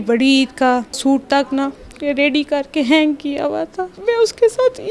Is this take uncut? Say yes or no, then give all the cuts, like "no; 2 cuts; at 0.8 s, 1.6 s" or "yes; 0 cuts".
no; 2 cuts; at 1.0 s, 3.9 s